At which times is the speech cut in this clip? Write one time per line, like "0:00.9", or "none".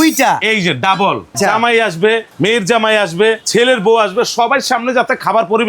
0:01.4
0:02.3
0:03.4

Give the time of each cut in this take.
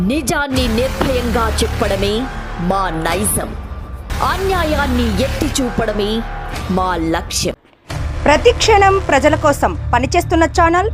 none

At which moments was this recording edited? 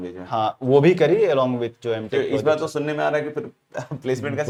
none

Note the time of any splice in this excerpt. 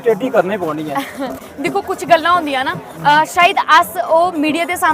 none

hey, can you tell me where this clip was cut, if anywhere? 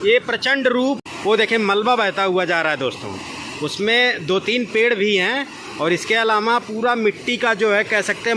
0:01.1

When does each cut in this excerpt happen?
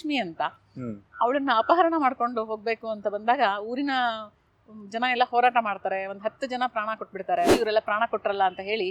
0:07.5

